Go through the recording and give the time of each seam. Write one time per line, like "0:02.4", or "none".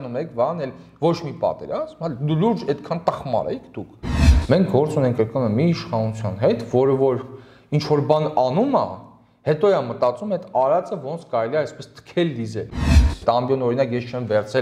0:04.2
0:12.7